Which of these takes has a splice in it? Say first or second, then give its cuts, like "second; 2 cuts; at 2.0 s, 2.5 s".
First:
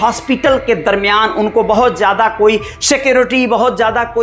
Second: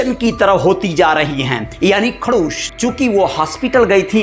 second; 1 cut; at 2.6 s